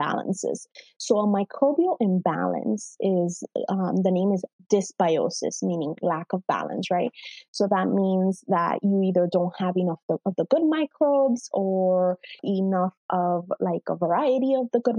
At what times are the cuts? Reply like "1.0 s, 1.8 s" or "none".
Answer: 12.4 s